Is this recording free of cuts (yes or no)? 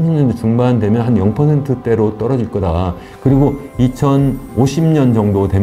no